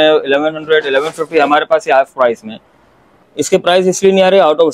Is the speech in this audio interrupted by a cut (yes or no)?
yes